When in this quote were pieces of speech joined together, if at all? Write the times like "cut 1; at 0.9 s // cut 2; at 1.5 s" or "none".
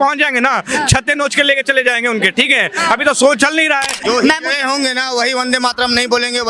cut 1; at 4.0 s